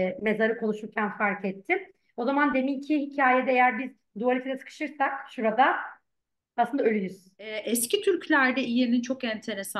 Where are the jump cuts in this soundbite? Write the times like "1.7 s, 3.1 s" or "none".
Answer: 7.6 s